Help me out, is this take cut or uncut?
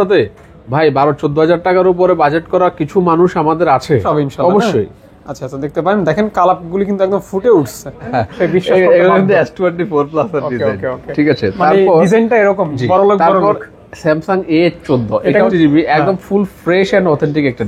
cut